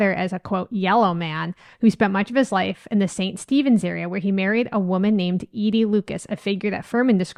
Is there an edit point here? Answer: no; 0 cuts

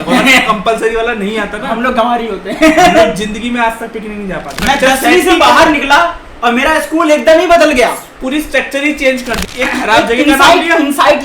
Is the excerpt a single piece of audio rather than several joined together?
no; 2 cuts; at 4.5 s, 9.4 s

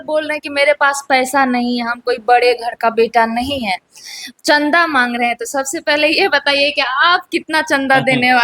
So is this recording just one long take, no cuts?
yes; 0 cuts

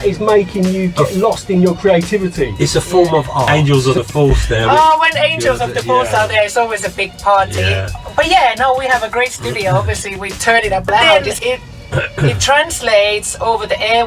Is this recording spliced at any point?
yes; 2 cuts; at 3.5 s, 11.2 s

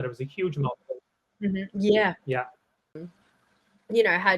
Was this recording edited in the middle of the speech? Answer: yes; 1 cut; at 3.1 s

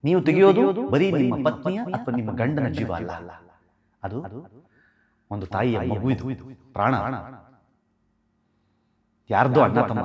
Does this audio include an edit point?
no; 0 cuts

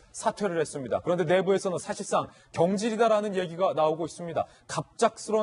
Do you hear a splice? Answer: no; 0 cuts

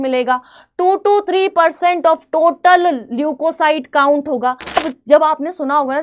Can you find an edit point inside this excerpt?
yes; 1 cut; at 4.8 s

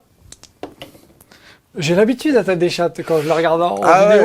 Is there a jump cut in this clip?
yes; 1 cut; at 1.6 s

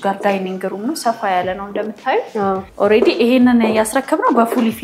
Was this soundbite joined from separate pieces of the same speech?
yes; 1 cut; at 2.7 s

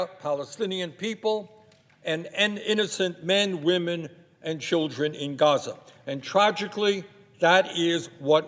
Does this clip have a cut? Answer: no; 0 cuts

